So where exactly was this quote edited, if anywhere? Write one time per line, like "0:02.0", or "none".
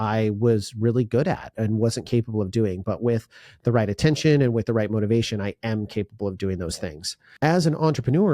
0:07.3